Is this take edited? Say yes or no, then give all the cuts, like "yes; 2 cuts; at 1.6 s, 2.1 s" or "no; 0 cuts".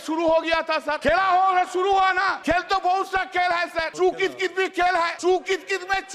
yes; 4 cuts; at 1.0 s, 2.3 s, 3.9 s, 5.1 s